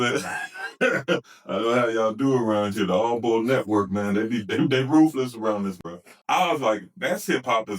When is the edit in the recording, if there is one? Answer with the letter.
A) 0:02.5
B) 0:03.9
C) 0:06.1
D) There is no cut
C